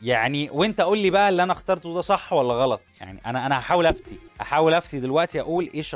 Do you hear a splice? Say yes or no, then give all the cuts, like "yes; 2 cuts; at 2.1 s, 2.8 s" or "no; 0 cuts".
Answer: no; 0 cuts